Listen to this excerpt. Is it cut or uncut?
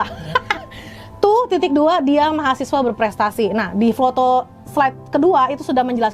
uncut